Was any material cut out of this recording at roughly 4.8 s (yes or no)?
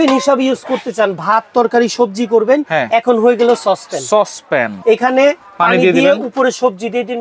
yes